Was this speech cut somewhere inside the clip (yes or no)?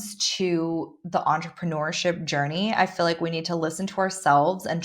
no